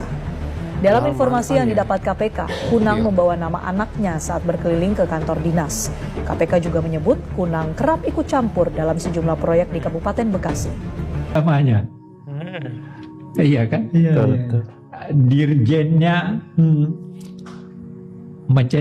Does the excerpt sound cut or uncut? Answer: cut